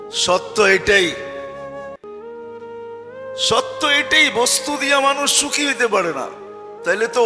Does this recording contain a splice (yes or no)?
yes